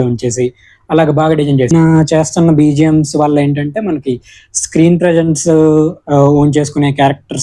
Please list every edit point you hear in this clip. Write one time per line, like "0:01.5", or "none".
0:01.7